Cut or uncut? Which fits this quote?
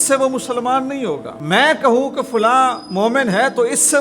cut